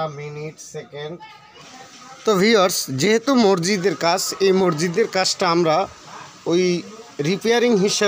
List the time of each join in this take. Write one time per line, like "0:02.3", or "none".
0:01.6